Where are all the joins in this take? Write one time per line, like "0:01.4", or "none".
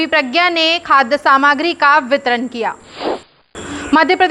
0:03.4